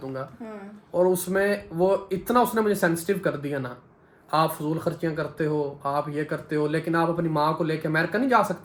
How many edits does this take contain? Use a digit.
0